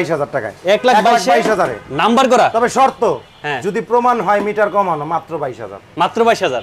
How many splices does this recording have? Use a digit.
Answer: 0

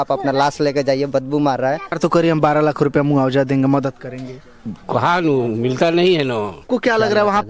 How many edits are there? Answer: 2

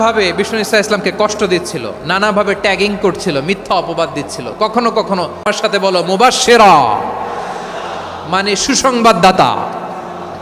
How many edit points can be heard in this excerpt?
1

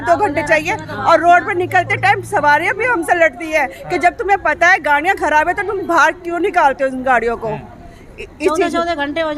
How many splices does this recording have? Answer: 0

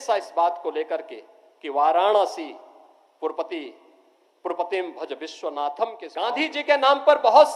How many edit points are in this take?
1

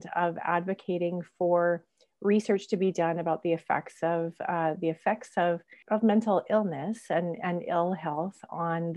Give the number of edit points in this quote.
1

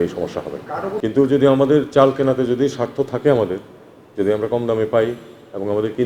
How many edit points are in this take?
1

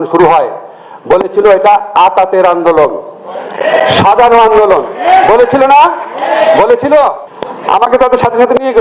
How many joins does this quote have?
1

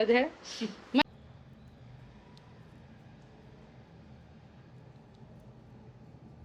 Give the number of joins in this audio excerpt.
1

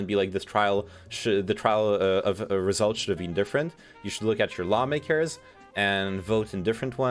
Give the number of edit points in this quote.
0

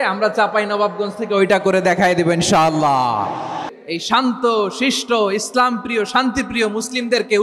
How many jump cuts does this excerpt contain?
1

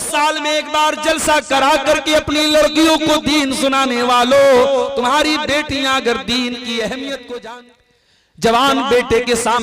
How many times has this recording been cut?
1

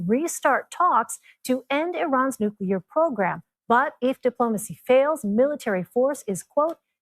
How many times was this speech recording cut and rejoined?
0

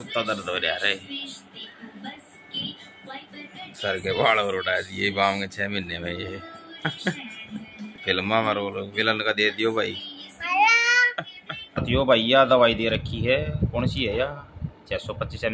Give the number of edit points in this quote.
2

